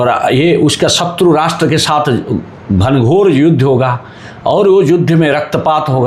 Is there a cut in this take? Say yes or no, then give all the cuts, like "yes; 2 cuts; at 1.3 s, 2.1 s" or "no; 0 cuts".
no; 0 cuts